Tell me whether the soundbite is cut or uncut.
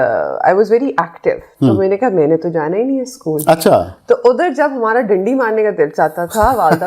cut